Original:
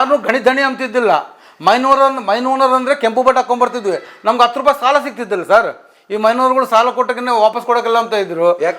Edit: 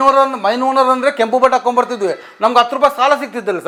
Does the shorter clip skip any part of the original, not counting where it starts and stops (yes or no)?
no